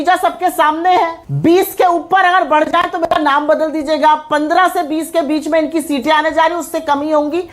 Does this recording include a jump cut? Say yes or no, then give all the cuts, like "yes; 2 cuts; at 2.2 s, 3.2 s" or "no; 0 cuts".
yes; 2 cuts; at 1.2 s, 4.3 s